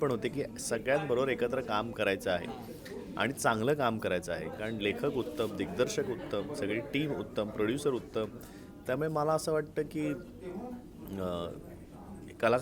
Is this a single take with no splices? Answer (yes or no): yes